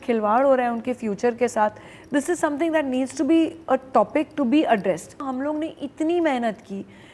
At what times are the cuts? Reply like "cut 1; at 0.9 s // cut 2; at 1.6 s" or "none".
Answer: cut 1; at 5.3 s